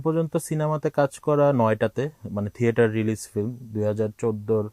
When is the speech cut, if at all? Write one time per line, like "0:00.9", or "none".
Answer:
none